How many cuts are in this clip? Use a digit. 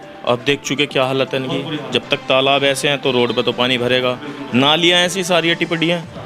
0